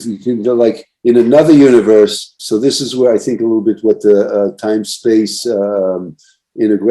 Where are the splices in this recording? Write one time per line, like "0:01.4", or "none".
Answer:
0:02.4